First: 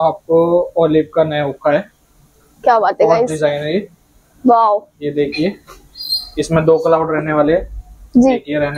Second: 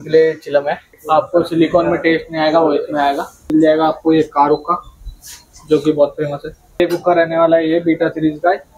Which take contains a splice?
second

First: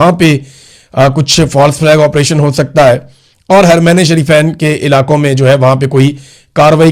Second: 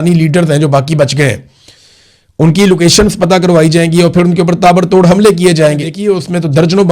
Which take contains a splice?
second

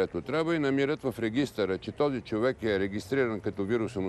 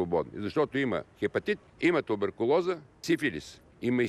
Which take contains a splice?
second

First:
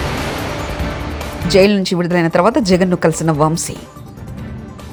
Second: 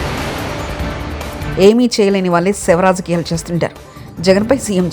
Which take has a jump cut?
second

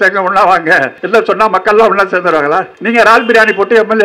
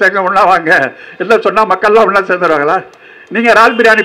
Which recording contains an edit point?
first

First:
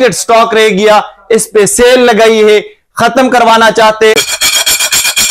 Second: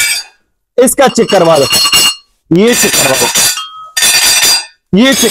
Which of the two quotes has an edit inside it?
first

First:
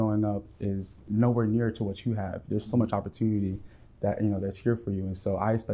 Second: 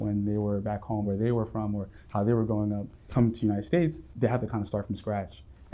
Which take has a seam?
second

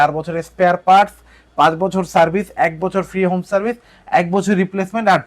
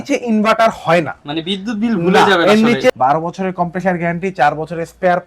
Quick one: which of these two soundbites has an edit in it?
second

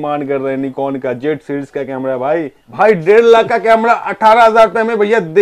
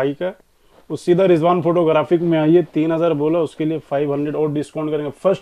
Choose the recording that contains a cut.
first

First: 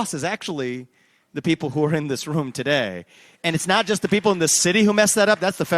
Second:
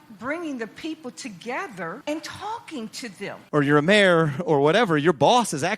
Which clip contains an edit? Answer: second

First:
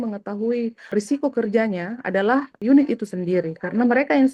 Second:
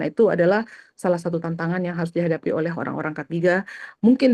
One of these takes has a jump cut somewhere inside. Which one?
first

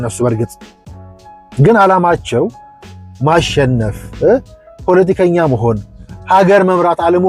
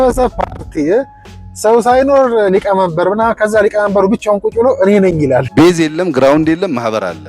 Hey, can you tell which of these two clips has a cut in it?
second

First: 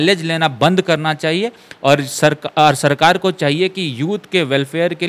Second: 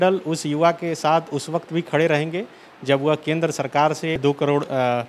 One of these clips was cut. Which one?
second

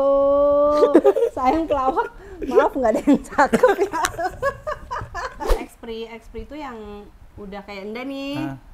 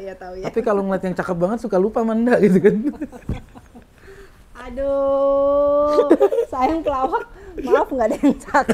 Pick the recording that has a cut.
first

